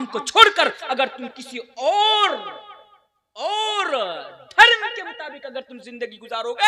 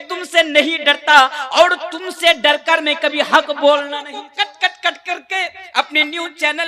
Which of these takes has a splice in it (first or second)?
second